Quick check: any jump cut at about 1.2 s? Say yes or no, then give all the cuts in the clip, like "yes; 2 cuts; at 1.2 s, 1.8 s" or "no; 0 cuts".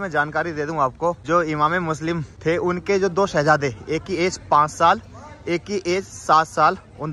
yes; 2 cuts; at 1.2 s, 2.3 s